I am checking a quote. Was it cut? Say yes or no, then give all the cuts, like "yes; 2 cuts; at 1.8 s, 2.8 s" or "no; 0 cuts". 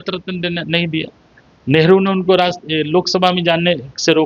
no; 0 cuts